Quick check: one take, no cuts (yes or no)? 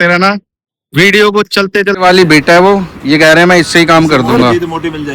no